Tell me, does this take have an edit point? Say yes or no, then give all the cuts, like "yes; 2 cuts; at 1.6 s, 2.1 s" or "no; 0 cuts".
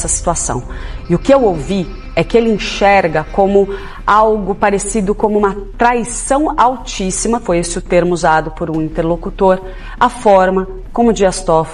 no; 0 cuts